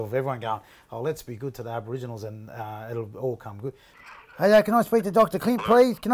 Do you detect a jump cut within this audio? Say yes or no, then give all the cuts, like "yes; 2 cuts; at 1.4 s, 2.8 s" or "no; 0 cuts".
yes; 1 cut; at 3.9 s